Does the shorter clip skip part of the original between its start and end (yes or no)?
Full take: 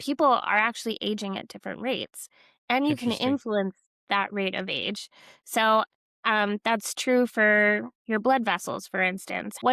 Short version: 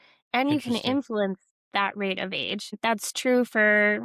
yes